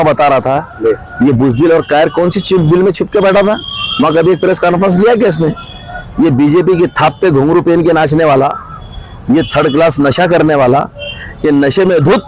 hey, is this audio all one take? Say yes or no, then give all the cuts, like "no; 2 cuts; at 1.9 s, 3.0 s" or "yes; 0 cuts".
yes; 0 cuts